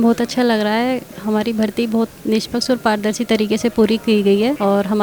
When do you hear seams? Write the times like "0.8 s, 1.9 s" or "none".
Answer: 1.1 s